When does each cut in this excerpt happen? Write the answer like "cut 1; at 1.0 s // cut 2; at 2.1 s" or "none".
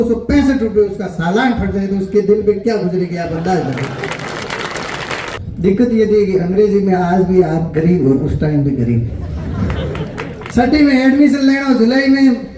cut 1; at 5.4 s // cut 2; at 10.4 s